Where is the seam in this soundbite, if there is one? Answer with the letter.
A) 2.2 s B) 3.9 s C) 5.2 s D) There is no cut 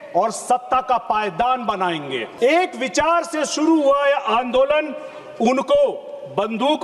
A